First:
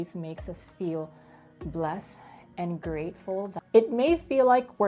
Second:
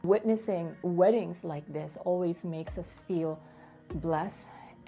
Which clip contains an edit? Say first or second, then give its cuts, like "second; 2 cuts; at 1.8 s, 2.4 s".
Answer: first; 1 cut; at 3.6 s